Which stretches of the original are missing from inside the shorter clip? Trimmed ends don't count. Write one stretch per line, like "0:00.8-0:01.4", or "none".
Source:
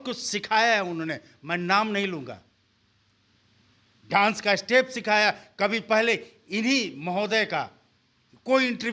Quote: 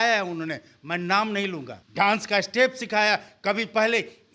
0:02.4-0:03.9